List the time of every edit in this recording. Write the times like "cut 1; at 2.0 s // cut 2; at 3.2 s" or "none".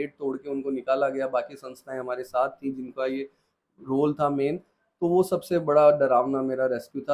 none